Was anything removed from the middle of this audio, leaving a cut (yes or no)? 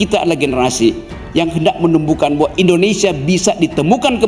no